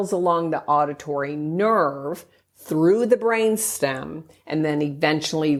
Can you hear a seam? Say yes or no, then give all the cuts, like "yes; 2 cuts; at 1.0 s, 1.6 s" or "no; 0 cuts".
no; 0 cuts